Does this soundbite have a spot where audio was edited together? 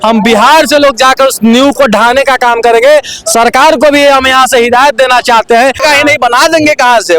yes; 1 cut; at 5.8 s

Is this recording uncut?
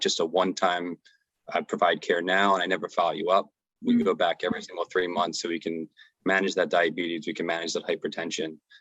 yes; 0 cuts

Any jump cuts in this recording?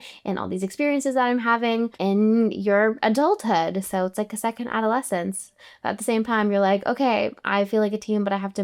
no; 0 cuts

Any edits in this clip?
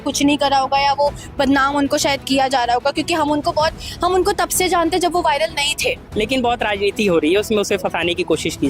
yes; 1 cut; at 6.0 s

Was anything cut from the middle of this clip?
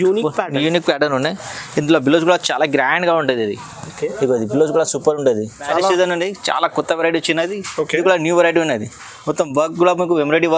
yes; 1 cut; at 5.6 s

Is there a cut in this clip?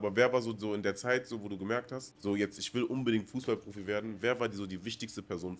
yes; 1 cut; at 2.0 s

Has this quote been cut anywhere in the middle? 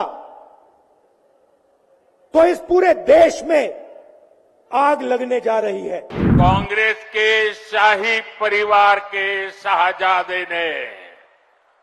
yes; 1 cut; at 6.2 s

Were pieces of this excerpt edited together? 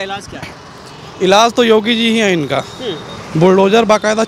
no; 0 cuts

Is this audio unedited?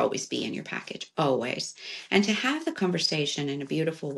yes; 0 cuts

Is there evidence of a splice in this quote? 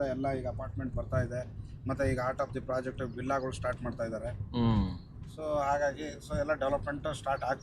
no; 0 cuts

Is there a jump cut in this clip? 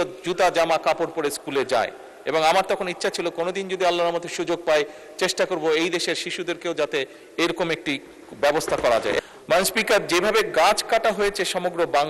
yes; 1 cut; at 9.2 s

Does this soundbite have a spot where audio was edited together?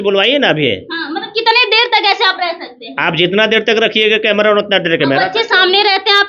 no; 0 cuts

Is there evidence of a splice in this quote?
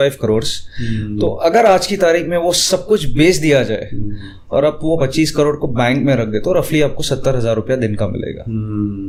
no; 0 cuts

